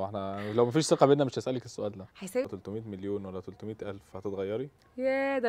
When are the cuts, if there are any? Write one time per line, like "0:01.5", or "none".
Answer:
0:02.5

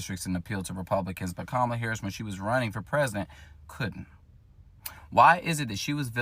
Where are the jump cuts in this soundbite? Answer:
none

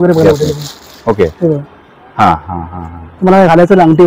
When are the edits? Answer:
none

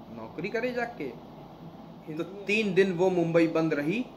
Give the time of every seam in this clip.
0:02.2

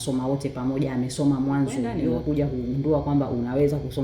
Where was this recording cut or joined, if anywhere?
0:01.8

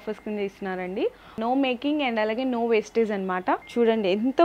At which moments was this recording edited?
0:01.4
0:03.7

